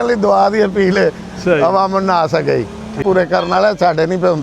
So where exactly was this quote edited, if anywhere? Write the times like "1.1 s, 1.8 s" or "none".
3.0 s